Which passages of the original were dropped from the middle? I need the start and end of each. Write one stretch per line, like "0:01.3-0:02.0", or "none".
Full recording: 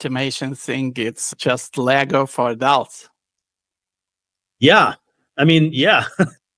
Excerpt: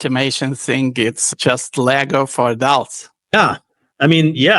0:03.3-0:04.7